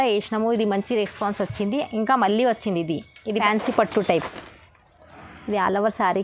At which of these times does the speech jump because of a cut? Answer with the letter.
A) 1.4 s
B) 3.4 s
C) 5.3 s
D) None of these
B